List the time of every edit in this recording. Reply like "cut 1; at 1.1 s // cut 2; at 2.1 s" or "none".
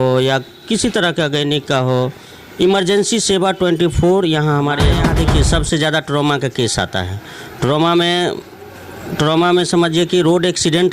cut 1; at 5.0 s